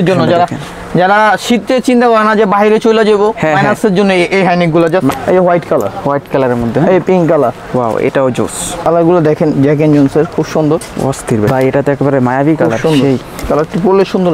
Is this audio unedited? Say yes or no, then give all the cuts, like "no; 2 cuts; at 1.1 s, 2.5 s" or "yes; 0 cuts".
no; 3 cuts; at 5.1 s, 8.7 s, 11.5 s